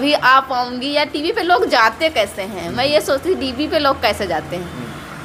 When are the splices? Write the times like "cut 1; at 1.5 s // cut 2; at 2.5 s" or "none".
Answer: none